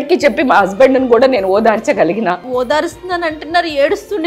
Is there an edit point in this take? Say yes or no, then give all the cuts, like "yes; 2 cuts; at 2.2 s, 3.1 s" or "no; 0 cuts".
yes; 1 cut; at 2.5 s